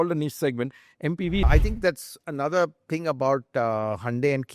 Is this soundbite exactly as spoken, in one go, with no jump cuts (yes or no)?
no